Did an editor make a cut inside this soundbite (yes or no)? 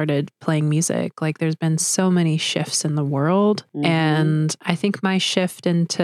no